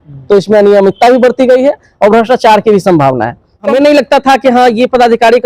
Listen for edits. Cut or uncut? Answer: cut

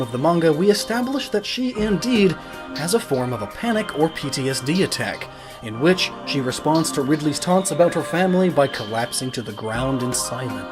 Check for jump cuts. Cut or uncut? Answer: uncut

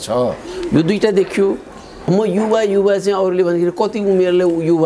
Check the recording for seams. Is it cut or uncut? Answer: cut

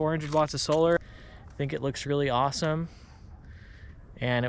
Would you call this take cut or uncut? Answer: cut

